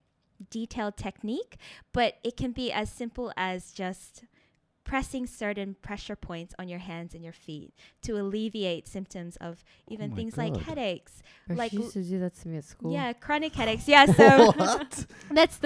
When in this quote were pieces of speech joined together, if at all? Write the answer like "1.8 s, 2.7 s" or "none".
none